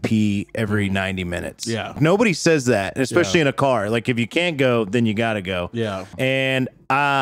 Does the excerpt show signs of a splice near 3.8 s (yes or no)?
no